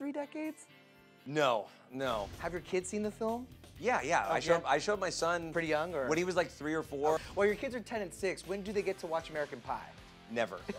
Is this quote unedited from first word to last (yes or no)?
no